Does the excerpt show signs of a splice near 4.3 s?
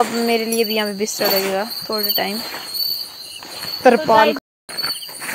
yes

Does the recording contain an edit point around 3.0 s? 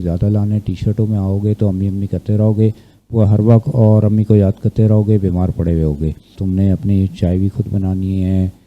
no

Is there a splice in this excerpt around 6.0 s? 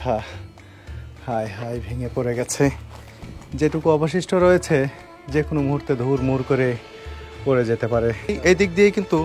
no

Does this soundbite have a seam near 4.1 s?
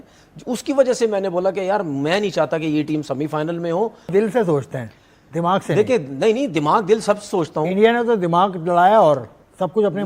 yes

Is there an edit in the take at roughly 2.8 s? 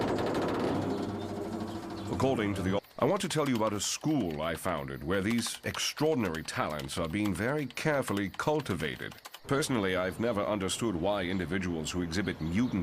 no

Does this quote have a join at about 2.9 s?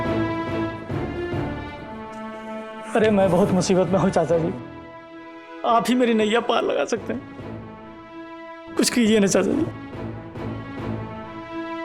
no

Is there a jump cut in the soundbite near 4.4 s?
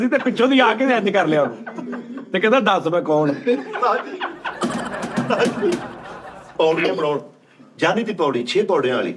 no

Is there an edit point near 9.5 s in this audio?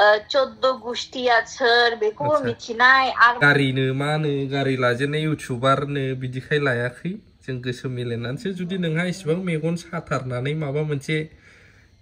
no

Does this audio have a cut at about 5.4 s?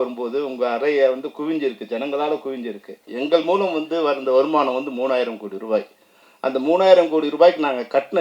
no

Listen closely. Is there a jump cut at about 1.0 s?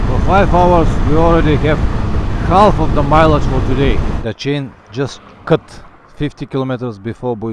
no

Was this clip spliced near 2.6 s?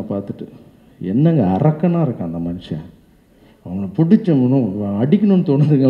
no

